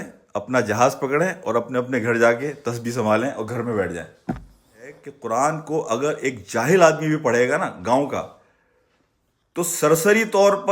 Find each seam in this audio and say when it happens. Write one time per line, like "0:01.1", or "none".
0:05.1